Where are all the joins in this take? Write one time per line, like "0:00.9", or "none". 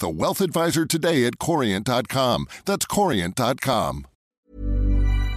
0:04.1